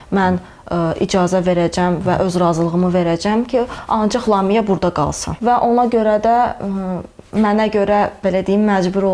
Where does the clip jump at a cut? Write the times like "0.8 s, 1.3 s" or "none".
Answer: 5.3 s